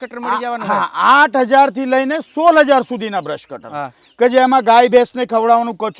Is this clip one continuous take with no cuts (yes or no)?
yes